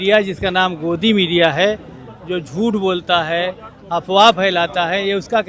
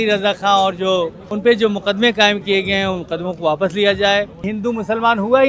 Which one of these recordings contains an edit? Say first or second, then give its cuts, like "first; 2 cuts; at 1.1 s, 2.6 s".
second; 2 cuts; at 1.2 s, 4.5 s